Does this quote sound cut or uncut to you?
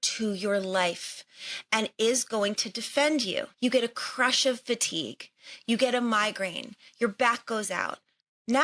cut